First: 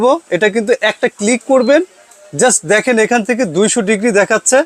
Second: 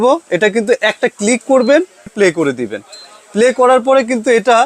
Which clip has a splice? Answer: second; 1 cut; at 2.1 s

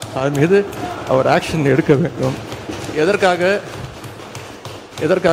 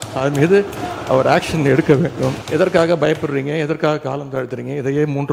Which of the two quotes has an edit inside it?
second; 1 cut; at 2.4 s

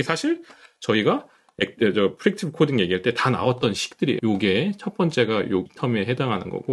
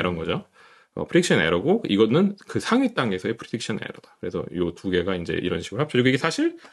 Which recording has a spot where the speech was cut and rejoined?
first; 2 cuts; at 4.2 s, 5.7 s

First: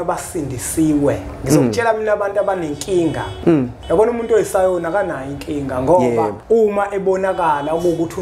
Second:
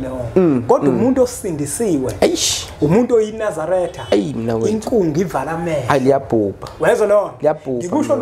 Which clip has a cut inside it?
first; 2 cuts; at 3.5 s, 6.4 s

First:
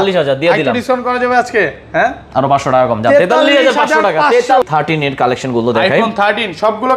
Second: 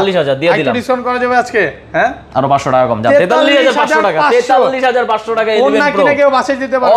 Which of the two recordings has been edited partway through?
first; 1 cut; at 4.6 s

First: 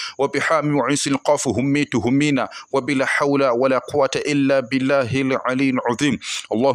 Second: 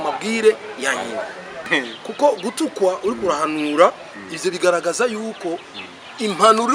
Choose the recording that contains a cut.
second; 1 cut; at 1.7 s

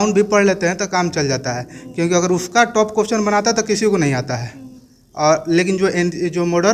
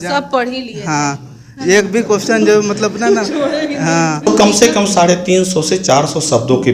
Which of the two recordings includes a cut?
second; 1 cut; at 4.3 s

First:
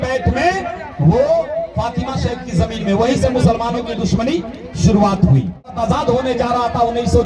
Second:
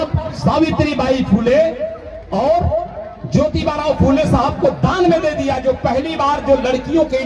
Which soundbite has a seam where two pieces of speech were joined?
first; 1 cut; at 5.8 s

